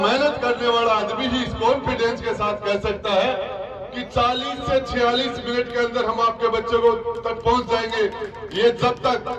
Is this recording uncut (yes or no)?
yes